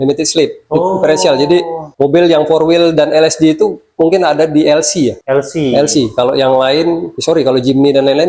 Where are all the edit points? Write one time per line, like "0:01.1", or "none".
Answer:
none